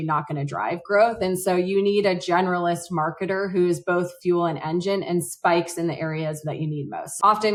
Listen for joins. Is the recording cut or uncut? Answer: uncut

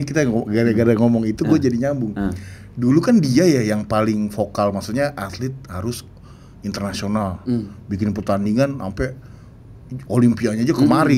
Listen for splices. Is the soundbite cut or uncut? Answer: uncut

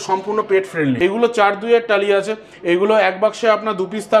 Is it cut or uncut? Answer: cut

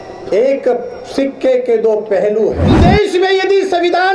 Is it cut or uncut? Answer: cut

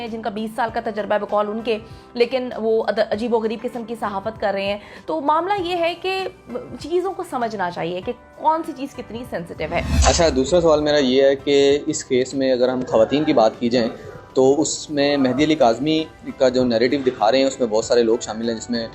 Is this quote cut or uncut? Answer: uncut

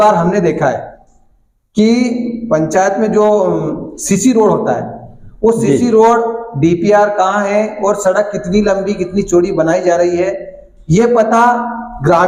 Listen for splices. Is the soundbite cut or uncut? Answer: uncut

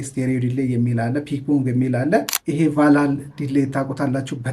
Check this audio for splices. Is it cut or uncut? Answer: cut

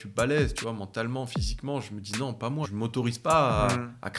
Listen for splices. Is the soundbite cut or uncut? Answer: cut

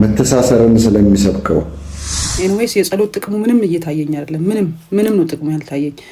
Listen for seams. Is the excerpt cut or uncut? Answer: cut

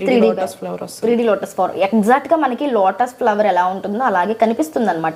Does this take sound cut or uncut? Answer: uncut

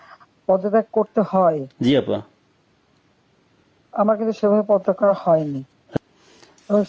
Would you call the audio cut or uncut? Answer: cut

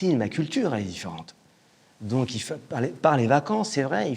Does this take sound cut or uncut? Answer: uncut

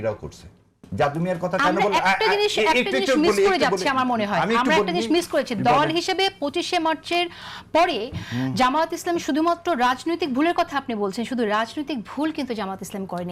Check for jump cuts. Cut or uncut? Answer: uncut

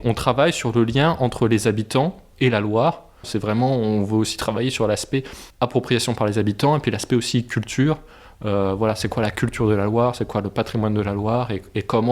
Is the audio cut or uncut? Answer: cut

